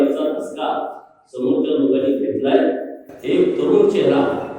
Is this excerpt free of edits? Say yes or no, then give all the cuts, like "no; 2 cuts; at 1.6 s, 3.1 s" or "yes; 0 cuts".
yes; 0 cuts